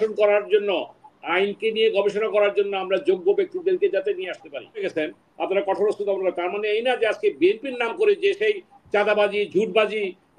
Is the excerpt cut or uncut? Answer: cut